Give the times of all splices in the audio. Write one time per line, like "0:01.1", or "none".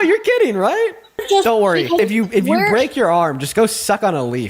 0:01.2
0:02.0